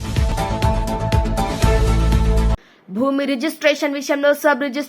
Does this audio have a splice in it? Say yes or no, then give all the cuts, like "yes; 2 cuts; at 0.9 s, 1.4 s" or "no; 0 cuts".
yes; 1 cut; at 2.7 s